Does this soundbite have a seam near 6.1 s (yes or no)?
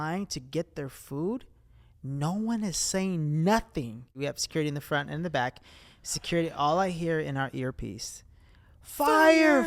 no